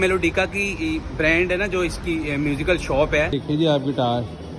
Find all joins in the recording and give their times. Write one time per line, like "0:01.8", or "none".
0:03.4